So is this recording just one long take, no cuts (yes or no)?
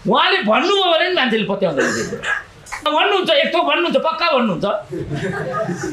no